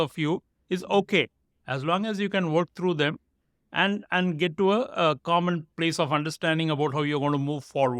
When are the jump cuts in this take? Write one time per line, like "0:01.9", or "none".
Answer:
none